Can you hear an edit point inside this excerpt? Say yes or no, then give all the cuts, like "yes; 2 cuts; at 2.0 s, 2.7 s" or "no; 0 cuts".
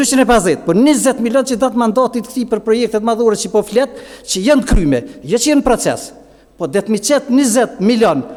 no; 0 cuts